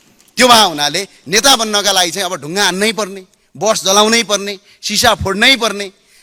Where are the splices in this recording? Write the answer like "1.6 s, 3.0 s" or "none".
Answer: none